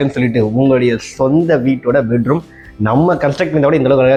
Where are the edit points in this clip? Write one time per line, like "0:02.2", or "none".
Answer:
none